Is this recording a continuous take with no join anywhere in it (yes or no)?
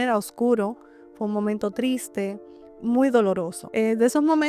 no